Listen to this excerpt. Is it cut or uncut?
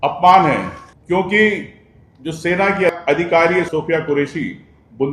uncut